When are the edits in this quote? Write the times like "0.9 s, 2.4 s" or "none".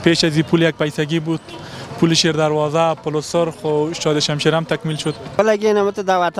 5.3 s